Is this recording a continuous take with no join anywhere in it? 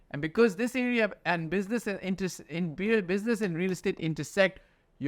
yes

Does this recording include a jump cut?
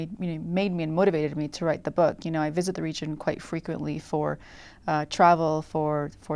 no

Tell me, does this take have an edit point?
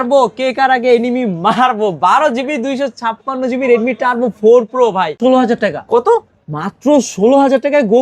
yes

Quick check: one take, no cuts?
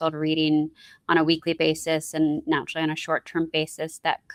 yes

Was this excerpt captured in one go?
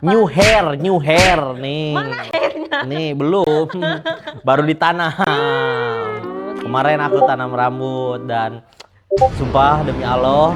yes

